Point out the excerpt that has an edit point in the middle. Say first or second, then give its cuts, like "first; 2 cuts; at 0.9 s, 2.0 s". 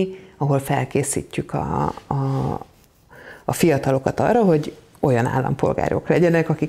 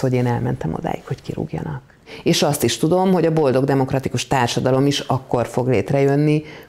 second; 1 cut; at 2.0 s